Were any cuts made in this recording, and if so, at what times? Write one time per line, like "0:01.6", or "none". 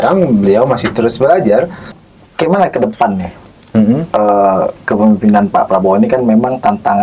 0:02.0